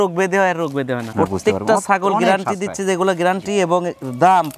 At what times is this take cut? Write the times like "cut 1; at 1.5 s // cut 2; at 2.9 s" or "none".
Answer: cut 1; at 1.1 s